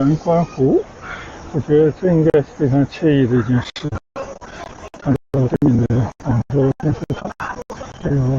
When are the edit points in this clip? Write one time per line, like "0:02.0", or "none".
none